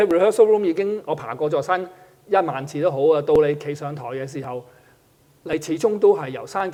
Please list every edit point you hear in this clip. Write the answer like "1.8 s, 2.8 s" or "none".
none